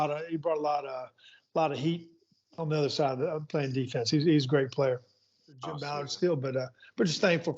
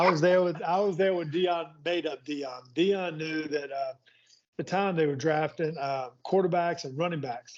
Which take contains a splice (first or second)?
first